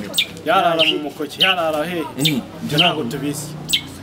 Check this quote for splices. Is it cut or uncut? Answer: uncut